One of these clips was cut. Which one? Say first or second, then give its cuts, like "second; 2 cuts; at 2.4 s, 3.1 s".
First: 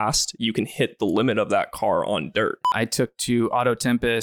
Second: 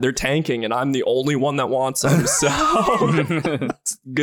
first; 1 cut; at 2.7 s